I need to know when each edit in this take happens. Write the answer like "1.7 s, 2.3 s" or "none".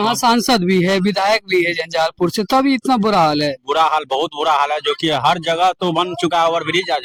none